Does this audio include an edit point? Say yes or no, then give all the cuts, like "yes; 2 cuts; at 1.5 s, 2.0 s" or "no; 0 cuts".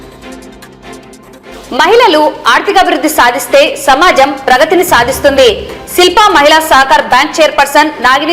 yes; 1 cut; at 0.9 s